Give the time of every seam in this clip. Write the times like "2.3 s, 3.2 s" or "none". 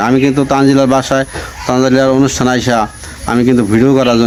none